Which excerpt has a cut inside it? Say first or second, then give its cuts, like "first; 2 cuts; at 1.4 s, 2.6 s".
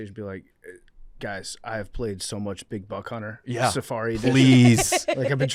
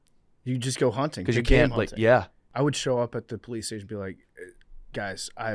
second; 1 cut; at 2.4 s